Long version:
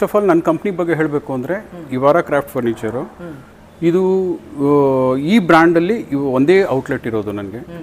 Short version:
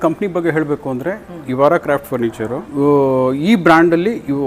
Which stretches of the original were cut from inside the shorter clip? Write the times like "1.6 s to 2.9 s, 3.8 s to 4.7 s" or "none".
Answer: 3.1 s to 4.5 s